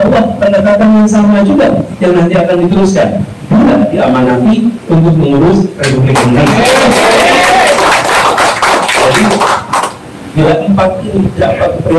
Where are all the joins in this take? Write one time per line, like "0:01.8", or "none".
0:10.3